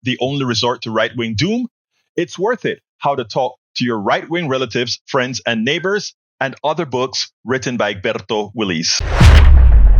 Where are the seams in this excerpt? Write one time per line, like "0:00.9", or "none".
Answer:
0:09.0